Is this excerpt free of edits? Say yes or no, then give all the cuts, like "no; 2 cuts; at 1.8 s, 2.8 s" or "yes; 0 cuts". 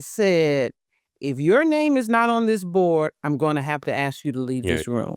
yes; 0 cuts